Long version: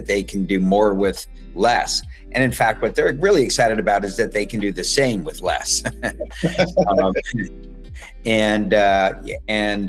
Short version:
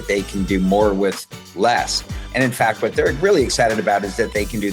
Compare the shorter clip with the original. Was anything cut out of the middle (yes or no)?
no